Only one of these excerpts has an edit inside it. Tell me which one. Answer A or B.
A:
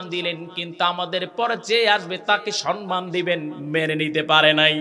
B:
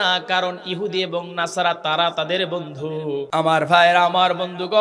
B